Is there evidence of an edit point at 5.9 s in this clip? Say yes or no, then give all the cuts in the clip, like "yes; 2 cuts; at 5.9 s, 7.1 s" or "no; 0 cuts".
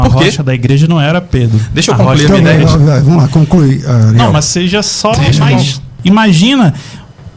yes; 1 cut; at 5.9 s